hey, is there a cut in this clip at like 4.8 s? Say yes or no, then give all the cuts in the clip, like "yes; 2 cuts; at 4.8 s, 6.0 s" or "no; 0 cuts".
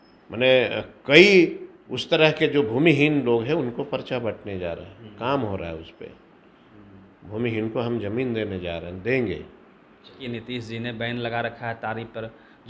no; 1 cut; at 10.2 s